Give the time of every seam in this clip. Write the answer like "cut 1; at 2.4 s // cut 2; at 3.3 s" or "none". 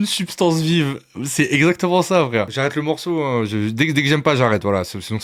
none